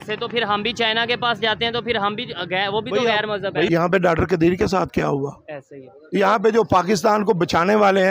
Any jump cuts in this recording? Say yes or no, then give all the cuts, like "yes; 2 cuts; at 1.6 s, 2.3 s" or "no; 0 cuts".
yes; 1 cut; at 3.7 s